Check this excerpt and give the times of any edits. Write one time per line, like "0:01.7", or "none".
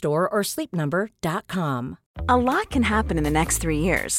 0:02.0